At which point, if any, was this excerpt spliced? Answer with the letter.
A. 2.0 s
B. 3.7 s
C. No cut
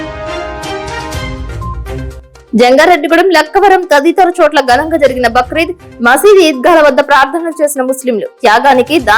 A